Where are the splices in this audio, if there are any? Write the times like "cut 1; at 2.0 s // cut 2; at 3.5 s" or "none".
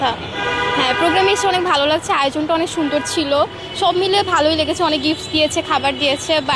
none